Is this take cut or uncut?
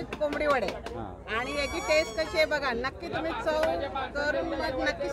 uncut